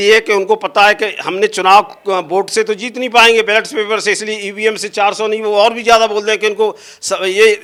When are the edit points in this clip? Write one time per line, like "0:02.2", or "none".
none